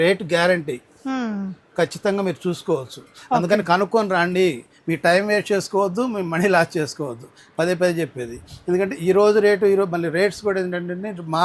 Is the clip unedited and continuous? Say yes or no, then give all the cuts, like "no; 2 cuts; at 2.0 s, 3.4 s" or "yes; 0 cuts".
yes; 0 cuts